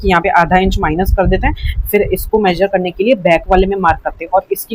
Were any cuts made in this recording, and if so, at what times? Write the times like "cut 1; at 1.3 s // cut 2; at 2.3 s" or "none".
none